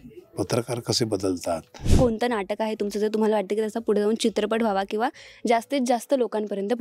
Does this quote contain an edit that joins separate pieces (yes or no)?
yes